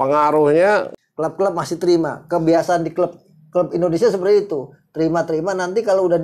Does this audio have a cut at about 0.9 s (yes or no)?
yes